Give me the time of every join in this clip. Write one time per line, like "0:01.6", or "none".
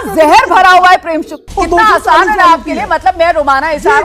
0:01.4